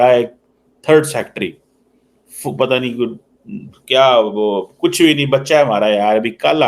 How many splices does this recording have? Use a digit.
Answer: 0